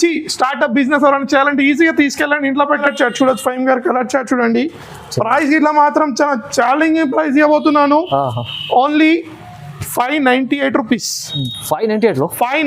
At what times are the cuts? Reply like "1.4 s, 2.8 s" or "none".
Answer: 2.9 s